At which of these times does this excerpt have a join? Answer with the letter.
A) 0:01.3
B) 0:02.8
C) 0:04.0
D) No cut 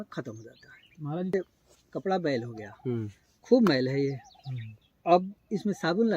A